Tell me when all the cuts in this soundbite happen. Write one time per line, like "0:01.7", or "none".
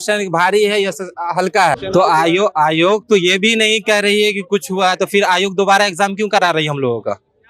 0:01.8